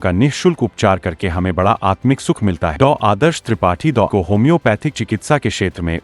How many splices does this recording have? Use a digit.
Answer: 2